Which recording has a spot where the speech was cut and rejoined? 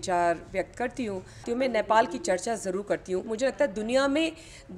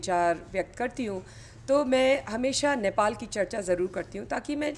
first; 2 cuts; at 1.5 s, 3.3 s

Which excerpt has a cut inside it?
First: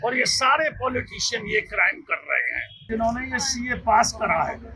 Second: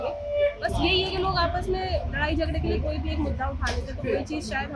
first; 1 cut; at 2.9 s

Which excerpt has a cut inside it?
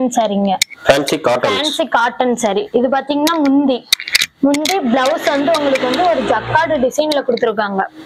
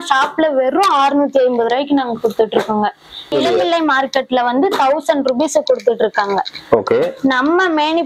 second; 1 cut; at 3.3 s

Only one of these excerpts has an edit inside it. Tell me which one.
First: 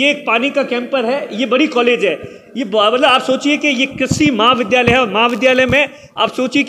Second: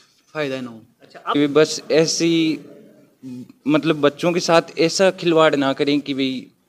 second; 1 cut; at 1.3 s

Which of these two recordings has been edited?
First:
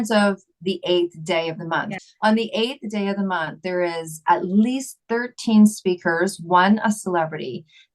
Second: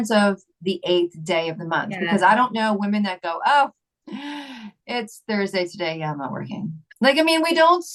first; 1 cut; at 1.9 s

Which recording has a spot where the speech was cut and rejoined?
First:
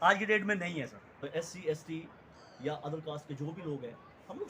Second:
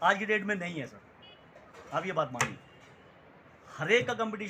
first; 1 cut; at 1.3 s

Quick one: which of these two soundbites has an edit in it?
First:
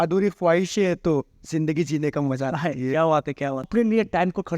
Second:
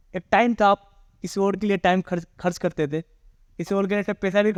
first; 1 cut; at 3.7 s

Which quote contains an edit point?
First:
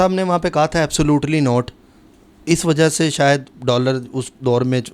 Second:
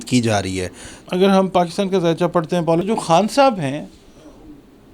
second; 2 cuts; at 0.9 s, 2.8 s

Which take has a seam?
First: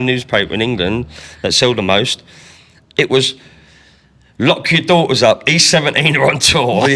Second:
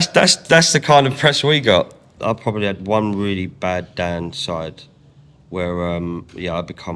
second; 1 cut; at 2.1 s

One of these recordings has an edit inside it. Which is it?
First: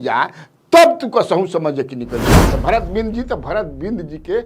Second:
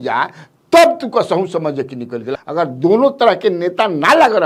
first; 1 cut; at 2.4 s

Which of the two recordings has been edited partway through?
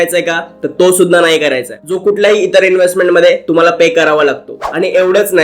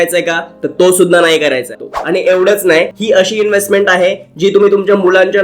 second; 2 cuts; at 1.8 s, 2.9 s

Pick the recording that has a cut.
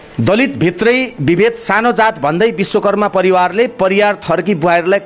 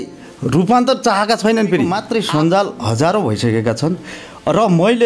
second; 1 cut; at 2.0 s

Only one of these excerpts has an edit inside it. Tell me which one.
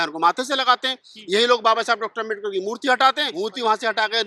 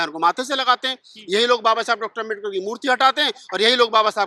first; 1 cut; at 3.3 s

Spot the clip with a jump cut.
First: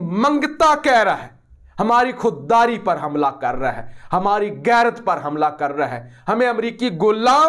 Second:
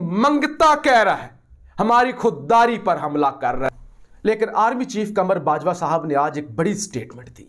second; 1 cut; at 3.9 s

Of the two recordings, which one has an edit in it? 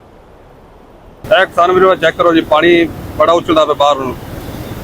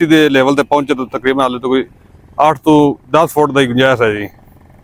first; 1 cut; at 1.2 s

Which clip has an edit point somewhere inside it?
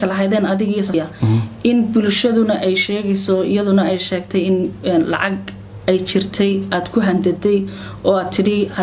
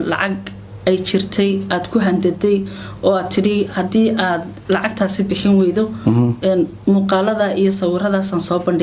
first; 1 cut; at 0.9 s

